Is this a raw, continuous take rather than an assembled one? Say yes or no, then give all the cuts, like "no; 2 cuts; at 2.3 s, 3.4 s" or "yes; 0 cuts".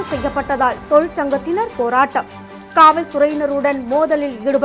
yes; 0 cuts